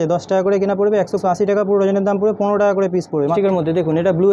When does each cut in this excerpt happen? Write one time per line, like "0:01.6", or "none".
0:01.2
0:03.3